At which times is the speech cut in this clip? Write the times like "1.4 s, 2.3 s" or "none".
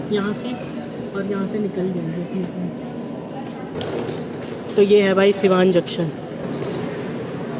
none